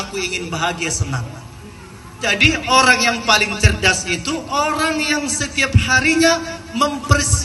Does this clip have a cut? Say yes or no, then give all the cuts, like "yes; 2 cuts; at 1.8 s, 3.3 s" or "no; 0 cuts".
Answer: no; 0 cuts